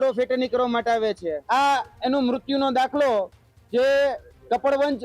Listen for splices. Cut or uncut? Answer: cut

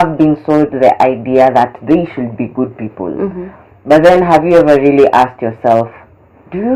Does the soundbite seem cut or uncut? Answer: uncut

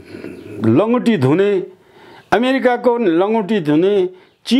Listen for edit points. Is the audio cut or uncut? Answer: uncut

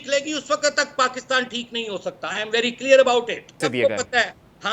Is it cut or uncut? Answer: cut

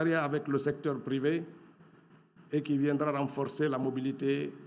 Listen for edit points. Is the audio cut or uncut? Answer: uncut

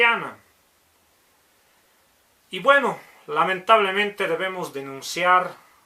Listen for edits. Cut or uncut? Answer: cut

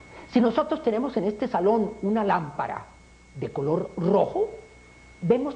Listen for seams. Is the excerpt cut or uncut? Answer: cut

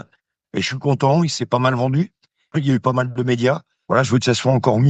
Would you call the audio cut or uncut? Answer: cut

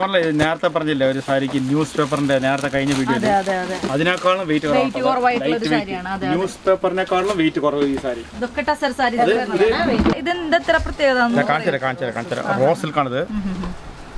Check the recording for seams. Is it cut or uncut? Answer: cut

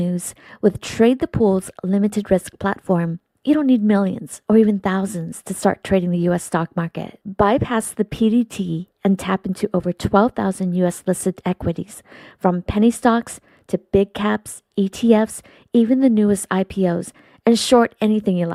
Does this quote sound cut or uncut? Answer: uncut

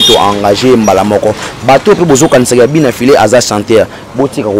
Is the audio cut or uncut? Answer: uncut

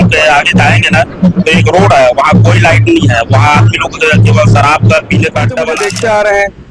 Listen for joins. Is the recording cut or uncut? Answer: cut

